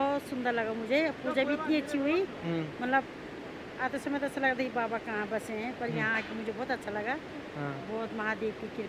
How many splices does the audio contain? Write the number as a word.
zero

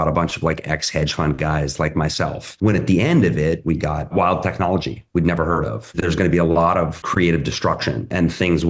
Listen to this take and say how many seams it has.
three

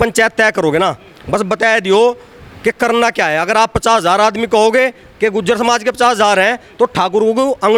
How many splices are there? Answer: zero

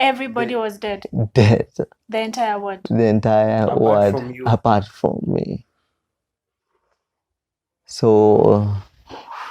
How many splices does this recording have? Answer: zero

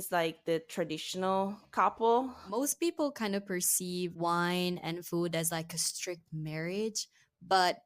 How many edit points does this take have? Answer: two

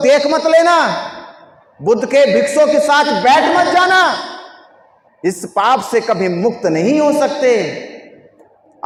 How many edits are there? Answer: zero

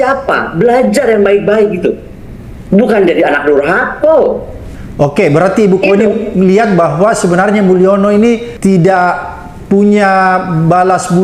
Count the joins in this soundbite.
zero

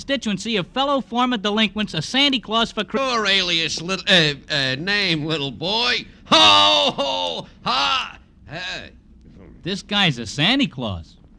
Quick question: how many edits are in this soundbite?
zero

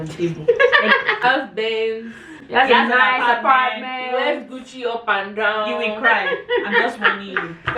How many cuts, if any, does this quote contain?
one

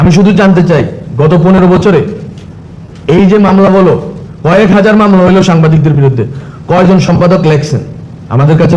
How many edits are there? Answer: zero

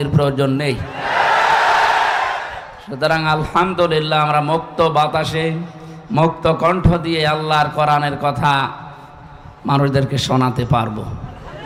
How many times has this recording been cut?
zero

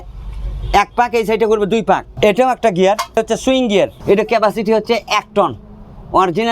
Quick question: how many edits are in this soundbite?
two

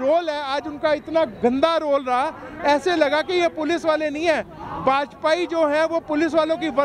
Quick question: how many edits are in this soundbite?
zero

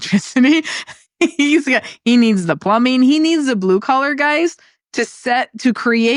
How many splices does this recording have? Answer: zero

